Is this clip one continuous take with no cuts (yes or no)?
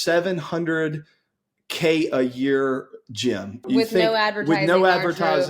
no